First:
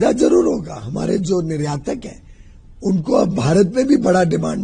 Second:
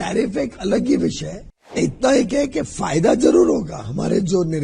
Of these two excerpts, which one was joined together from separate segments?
second; 1 cut; at 1.8 s

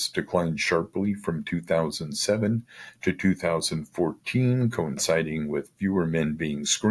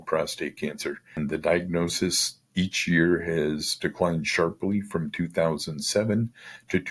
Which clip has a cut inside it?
second; 1 cut; at 1.2 s

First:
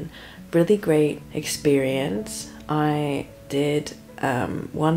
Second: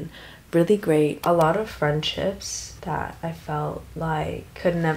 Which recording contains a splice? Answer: second; 1 cut; at 1.2 s

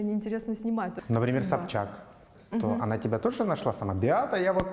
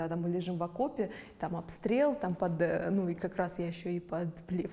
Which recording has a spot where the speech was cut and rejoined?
first; 1 cut; at 1.0 s

